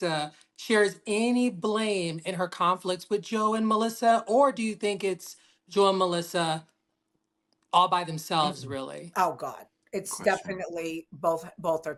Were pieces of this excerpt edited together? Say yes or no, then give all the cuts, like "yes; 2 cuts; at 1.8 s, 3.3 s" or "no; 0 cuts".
no; 0 cuts